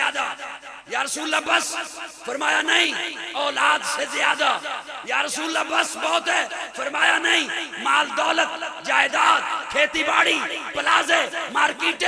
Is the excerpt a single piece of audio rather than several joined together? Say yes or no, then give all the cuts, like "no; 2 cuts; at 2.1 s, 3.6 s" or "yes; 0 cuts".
yes; 0 cuts